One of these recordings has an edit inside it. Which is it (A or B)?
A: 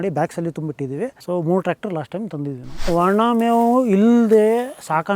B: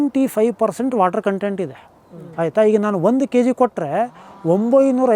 A